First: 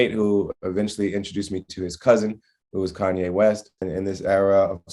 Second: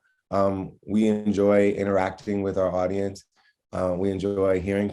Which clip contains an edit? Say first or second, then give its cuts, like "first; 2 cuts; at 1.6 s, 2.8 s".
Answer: first; 1 cut; at 3.9 s